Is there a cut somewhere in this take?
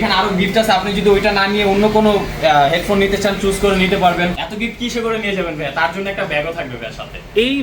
yes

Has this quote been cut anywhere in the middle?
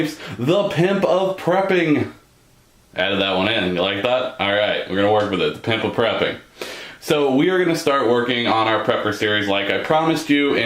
yes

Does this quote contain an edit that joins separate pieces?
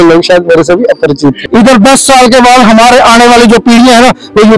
yes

